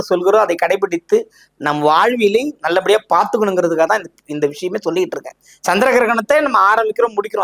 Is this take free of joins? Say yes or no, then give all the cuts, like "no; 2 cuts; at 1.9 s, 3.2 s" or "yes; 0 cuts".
yes; 0 cuts